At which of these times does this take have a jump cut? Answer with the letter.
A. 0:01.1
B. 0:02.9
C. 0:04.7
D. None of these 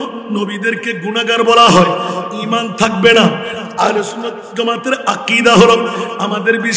D